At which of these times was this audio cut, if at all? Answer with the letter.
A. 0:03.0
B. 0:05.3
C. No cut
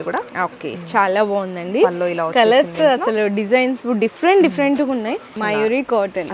B